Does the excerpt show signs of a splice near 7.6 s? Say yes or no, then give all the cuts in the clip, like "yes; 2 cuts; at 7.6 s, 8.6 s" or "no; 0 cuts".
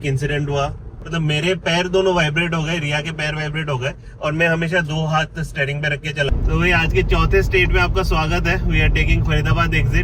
no; 2 cuts; at 0.9 s, 6.3 s